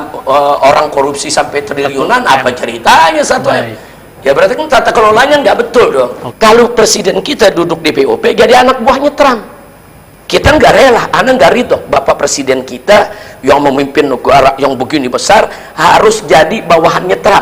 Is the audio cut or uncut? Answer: cut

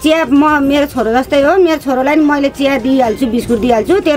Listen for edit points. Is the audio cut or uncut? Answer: uncut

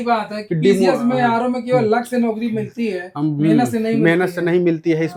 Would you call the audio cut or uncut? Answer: uncut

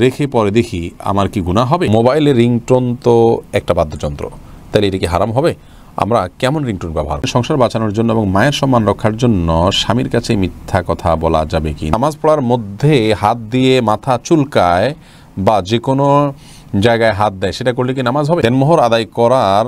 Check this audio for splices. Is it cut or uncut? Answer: cut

